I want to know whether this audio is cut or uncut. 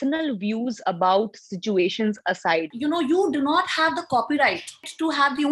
cut